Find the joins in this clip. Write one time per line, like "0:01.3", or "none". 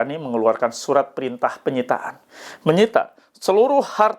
none